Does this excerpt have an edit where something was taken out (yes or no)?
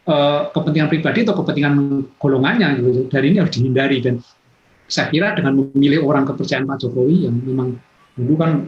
no